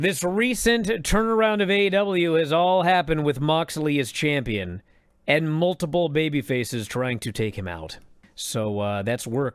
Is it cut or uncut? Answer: uncut